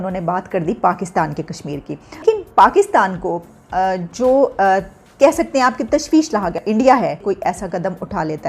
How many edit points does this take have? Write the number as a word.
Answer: three